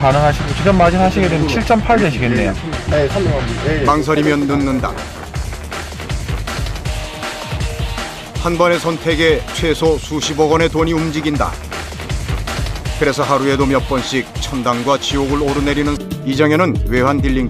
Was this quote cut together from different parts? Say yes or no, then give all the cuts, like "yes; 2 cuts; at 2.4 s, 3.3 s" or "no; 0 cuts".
no; 0 cuts